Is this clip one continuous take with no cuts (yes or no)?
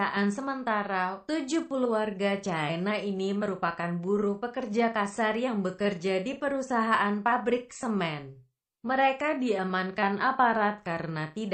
yes